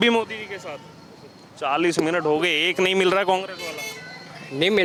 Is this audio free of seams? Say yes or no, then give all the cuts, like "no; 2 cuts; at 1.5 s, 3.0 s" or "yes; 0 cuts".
yes; 0 cuts